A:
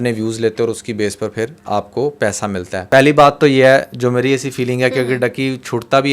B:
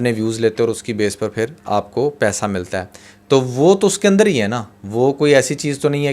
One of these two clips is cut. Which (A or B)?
A